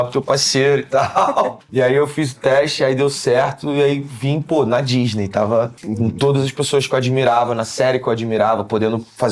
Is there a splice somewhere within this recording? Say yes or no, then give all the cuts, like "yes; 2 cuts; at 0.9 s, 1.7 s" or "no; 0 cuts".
yes; 2 cuts; at 1.6 s, 5.8 s